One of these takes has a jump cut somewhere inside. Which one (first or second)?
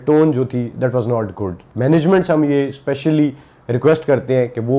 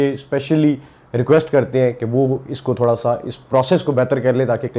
first